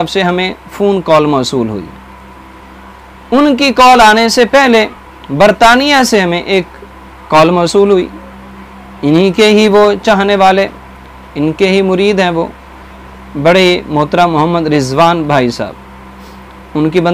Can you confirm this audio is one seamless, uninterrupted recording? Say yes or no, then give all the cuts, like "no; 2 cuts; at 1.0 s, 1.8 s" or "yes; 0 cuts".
yes; 0 cuts